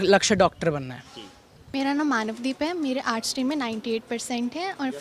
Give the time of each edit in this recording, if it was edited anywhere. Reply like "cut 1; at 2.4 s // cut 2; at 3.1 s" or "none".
cut 1; at 1.5 s